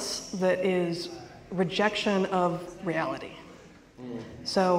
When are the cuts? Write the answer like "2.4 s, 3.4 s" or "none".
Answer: none